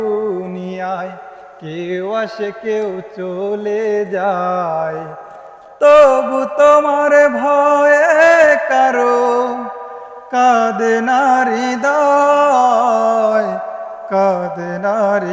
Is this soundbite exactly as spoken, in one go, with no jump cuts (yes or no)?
yes